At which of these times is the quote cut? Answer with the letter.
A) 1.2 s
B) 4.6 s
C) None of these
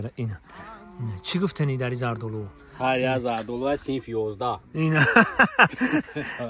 C